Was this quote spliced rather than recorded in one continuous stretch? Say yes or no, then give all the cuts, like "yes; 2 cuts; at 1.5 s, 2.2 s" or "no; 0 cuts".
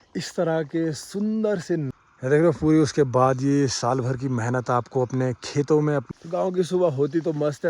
yes; 2 cuts; at 2.0 s, 6.1 s